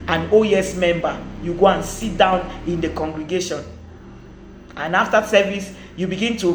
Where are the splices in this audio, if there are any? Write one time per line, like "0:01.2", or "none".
none